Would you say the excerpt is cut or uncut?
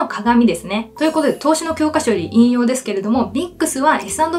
uncut